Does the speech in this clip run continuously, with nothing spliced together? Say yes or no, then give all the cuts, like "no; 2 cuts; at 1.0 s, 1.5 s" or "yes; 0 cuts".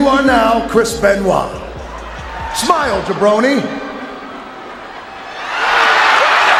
yes; 0 cuts